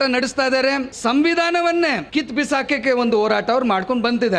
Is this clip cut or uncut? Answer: cut